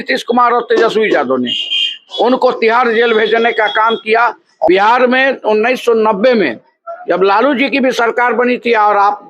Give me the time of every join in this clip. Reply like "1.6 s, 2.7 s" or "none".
4.7 s